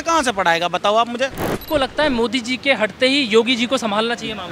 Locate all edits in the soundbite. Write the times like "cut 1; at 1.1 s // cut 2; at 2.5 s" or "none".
cut 1; at 1.5 s

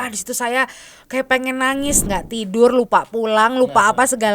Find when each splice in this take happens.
cut 1; at 2.0 s

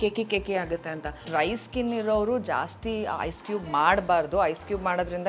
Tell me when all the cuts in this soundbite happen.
cut 1; at 1.3 s

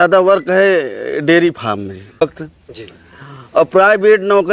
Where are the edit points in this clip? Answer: cut 1; at 2.2 s

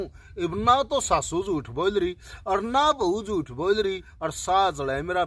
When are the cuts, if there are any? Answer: cut 1; at 4.1 s

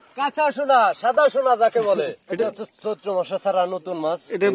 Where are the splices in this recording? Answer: cut 1; at 2.2 s

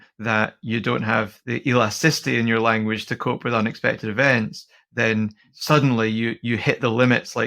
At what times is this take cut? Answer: cut 1; at 1.4 s // cut 2; at 5.5 s

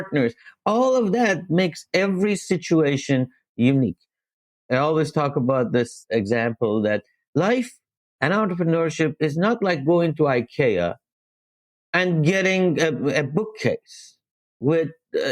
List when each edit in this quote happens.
cut 1; at 4.5 s // cut 2; at 6.0 s

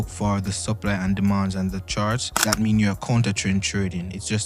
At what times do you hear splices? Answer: cut 1; at 2.3 s

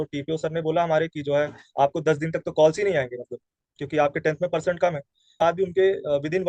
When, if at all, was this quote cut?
cut 1; at 5.4 s

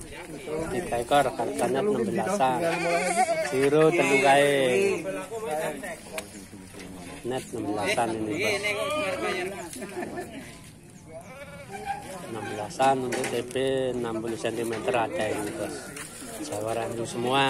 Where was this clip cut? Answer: none

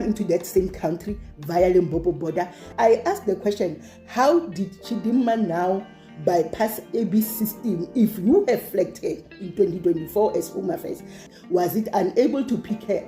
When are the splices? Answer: cut 1; at 2.6 s // cut 2; at 11.2 s

